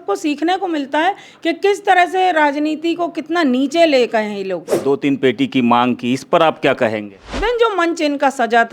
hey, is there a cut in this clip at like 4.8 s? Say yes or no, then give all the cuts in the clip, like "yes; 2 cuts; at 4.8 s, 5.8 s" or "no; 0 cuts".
yes; 2 cuts; at 4.8 s, 7.4 s